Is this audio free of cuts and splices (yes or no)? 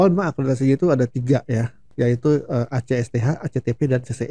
yes